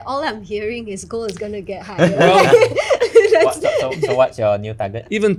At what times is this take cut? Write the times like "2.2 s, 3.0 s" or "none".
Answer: none

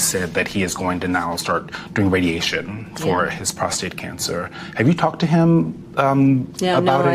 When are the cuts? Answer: none

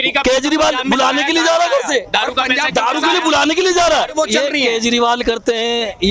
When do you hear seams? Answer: 4.1 s

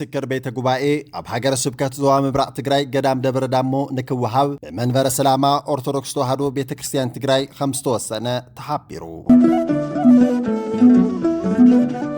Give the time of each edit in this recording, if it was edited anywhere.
9.1 s

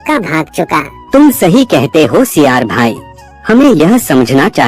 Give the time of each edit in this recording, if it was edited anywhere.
0.9 s

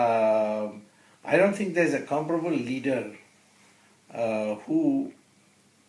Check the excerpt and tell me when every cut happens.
none

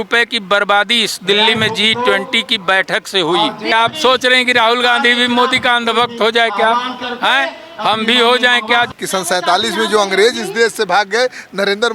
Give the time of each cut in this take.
3.7 s, 8.9 s

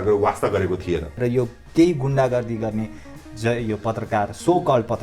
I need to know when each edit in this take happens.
1.1 s

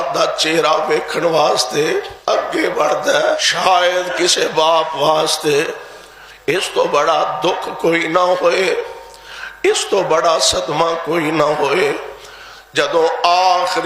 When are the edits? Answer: 2.5 s, 3.5 s

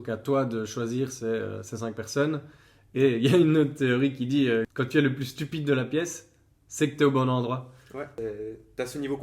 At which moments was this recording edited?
8.1 s

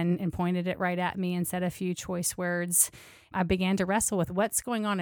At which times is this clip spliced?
3.3 s

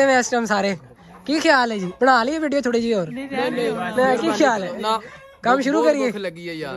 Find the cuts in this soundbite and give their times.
none

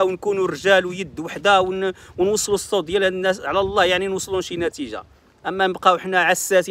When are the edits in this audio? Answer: none

